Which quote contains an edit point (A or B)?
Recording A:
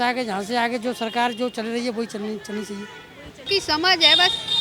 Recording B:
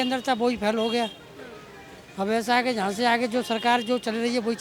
A